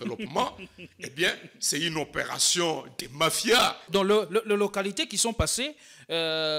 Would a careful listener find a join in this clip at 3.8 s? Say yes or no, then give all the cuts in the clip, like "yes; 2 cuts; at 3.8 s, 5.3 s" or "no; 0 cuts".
yes; 1 cut; at 3.8 s